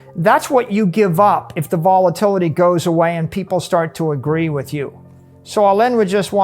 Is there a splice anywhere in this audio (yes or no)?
yes